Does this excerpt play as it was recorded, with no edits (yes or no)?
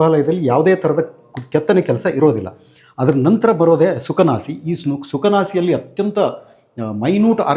yes